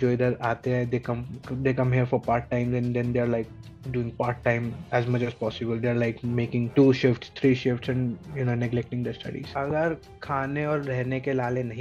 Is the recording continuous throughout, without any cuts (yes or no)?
no